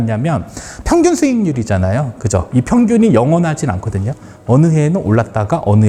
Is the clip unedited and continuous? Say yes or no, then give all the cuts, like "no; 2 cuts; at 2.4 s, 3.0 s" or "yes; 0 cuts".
yes; 0 cuts